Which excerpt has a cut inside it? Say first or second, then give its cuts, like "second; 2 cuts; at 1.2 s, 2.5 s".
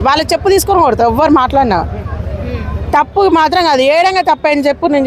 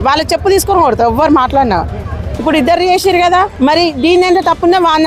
second; 2 cuts; at 2.3 s, 3.5 s